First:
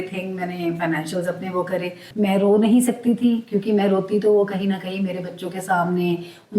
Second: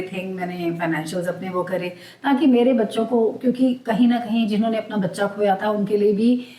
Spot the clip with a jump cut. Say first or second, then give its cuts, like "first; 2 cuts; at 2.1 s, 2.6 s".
first; 1 cut; at 2.0 s